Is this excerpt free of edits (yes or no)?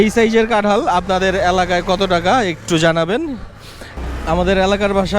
no